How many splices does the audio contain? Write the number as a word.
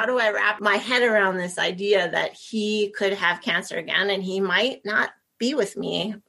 zero